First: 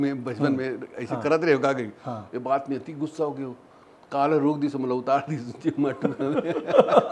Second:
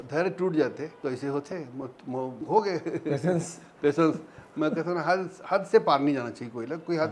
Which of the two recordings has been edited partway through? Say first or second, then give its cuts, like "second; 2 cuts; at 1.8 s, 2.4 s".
second; 2 cuts; at 0.9 s, 2.4 s